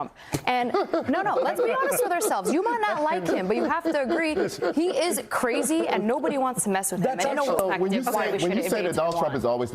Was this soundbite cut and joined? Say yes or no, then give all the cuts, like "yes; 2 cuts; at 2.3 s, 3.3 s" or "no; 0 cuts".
yes; 1 cut; at 7.6 s